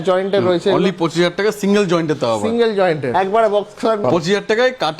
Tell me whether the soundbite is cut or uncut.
cut